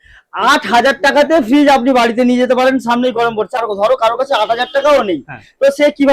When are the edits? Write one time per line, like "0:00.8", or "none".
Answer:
0:03.6